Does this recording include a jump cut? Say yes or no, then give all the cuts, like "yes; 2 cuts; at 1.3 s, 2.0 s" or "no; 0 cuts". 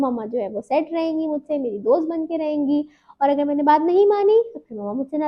no; 0 cuts